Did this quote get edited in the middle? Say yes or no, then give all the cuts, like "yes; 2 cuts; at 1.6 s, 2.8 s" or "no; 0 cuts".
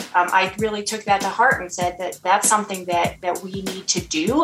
yes; 1 cut; at 2.2 s